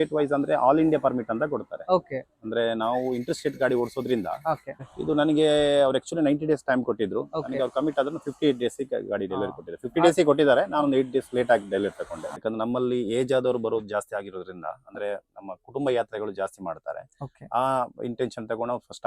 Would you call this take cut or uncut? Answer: cut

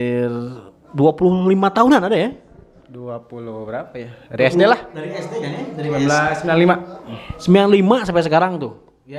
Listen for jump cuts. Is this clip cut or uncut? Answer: uncut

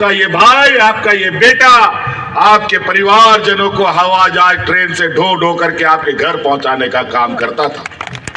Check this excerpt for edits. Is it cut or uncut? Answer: uncut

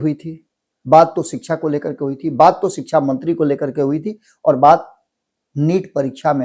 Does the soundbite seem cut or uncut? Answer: uncut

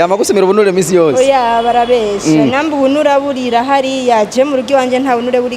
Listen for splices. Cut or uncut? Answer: uncut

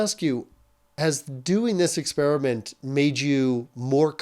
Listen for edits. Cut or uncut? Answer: cut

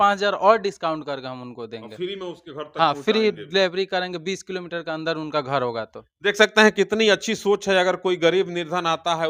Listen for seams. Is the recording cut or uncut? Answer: uncut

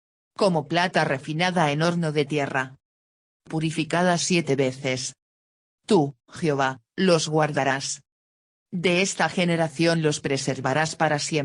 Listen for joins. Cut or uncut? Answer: uncut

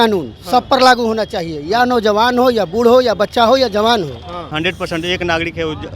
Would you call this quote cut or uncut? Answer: cut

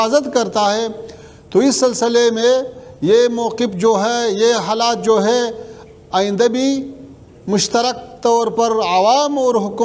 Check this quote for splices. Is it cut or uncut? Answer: uncut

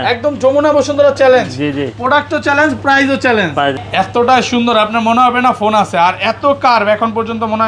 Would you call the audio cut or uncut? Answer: cut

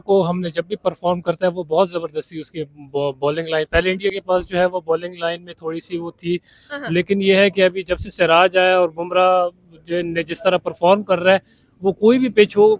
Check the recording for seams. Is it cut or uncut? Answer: uncut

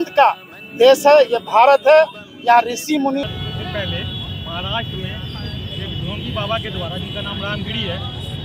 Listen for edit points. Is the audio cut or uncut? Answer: cut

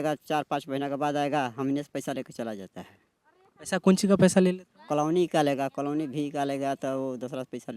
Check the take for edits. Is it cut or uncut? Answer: uncut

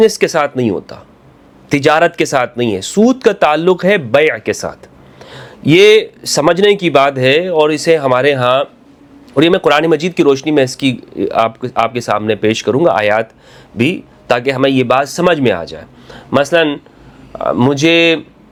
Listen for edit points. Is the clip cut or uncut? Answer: uncut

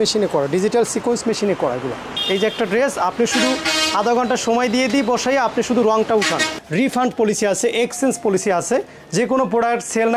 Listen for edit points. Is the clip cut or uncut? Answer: cut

